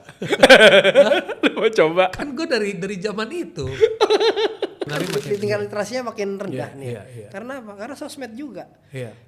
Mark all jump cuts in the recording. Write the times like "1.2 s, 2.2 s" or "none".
5.0 s